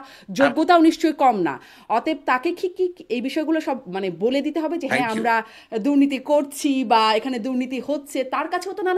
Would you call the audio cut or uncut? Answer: uncut